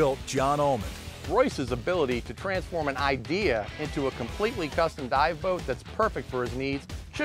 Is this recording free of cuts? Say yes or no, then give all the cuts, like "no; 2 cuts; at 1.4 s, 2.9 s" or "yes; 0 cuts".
no; 1 cut; at 1.2 s